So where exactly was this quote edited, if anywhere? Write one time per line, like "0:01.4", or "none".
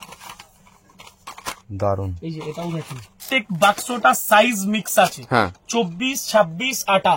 0:03.2